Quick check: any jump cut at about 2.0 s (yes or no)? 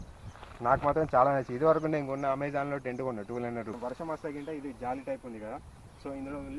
no